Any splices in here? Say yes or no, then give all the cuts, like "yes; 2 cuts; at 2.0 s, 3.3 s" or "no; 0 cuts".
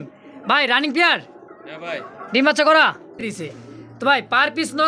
yes; 1 cut; at 3.3 s